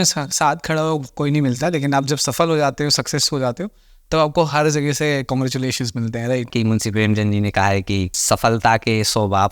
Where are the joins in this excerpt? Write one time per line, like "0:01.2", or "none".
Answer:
0:06.5
0:08.2